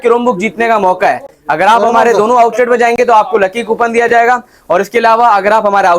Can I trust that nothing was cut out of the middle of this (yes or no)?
yes